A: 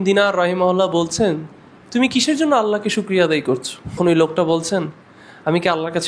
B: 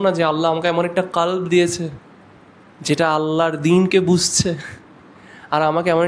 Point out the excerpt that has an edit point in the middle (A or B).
A